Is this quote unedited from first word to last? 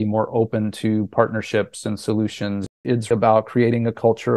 no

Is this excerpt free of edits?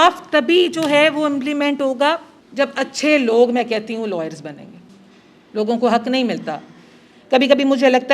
no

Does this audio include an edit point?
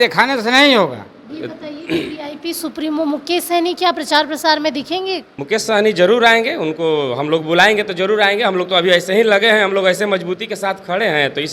yes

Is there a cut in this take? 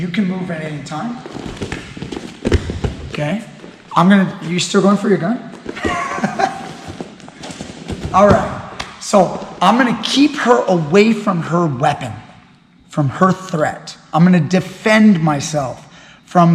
no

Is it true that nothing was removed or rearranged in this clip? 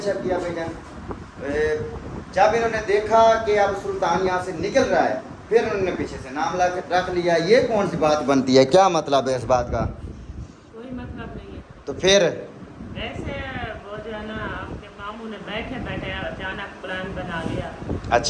yes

